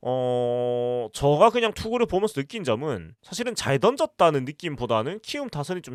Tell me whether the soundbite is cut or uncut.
uncut